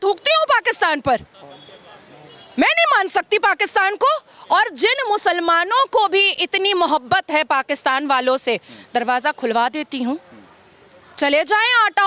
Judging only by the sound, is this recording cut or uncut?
uncut